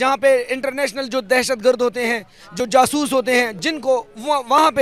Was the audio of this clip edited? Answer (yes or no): no